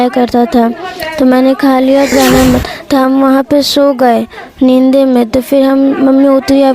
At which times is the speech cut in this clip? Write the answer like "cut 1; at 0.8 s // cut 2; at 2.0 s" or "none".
cut 1; at 2.1 s

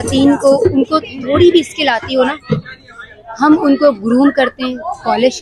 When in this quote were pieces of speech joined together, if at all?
none

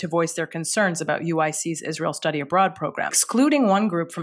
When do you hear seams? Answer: cut 1; at 3.2 s

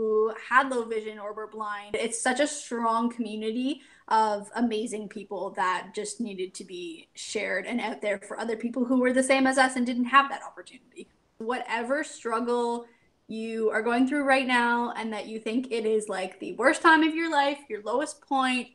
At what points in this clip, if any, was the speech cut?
cut 1; at 1.9 s // cut 2; at 11.4 s

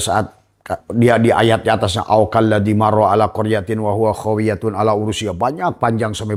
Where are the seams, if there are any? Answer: none

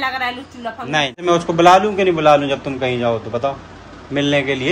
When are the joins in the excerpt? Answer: cut 1; at 1.2 s

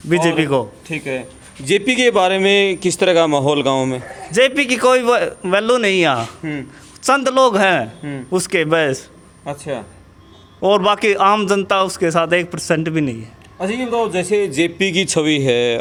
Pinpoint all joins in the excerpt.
none

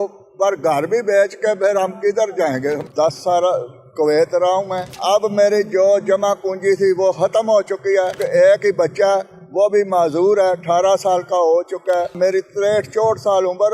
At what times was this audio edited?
cut 1; at 2.8 s // cut 2; at 4.9 s // cut 3; at 8.2 s // cut 4; at 12.1 s

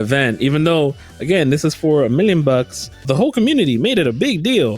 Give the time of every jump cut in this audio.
cut 1; at 3.0 s

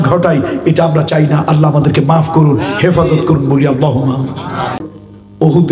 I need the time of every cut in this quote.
cut 1; at 4.8 s

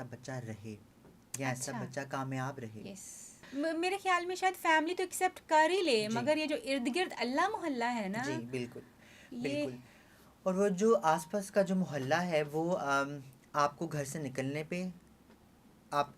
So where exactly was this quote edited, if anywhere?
none

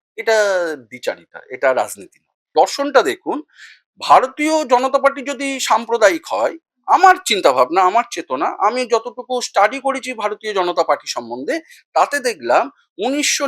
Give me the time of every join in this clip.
cut 1; at 2.4 s

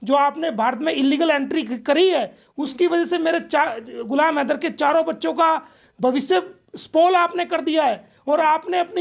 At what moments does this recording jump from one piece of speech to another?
none

